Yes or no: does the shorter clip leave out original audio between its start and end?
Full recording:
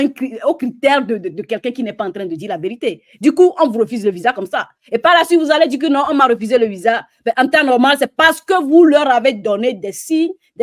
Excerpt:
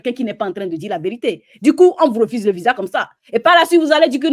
no